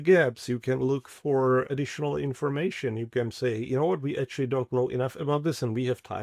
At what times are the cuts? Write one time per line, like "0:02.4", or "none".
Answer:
0:01.7